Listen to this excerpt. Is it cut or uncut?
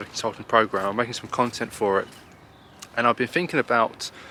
uncut